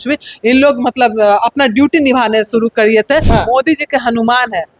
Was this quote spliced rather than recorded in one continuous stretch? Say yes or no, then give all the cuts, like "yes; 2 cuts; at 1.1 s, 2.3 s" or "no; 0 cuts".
yes; 1 cut; at 3.3 s